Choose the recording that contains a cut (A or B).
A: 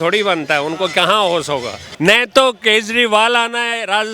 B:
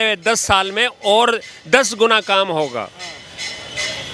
A